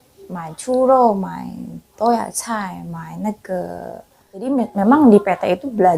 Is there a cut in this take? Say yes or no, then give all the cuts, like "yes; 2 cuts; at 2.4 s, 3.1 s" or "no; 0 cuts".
yes; 1 cut; at 4.5 s